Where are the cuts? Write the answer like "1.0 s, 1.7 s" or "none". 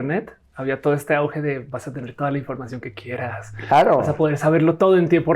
none